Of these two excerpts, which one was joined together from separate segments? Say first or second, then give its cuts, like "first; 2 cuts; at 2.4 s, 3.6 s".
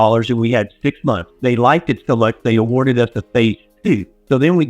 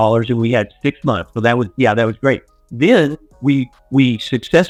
first; 1 cut; at 1.3 s